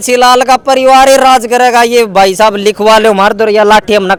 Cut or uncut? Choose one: uncut